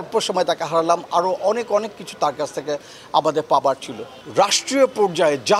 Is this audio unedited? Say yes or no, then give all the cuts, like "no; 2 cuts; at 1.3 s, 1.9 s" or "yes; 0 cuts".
no; 1 cut; at 4.2 s